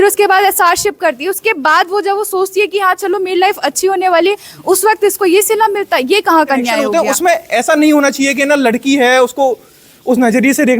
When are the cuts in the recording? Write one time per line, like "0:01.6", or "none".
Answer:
0:06.8